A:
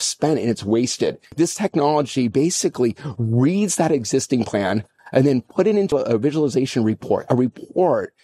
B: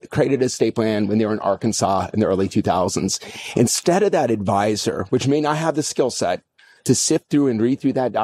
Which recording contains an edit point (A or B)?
A